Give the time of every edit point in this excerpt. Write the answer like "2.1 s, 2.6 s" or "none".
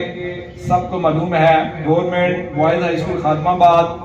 1.8 s